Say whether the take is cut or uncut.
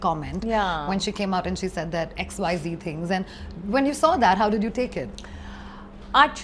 uncut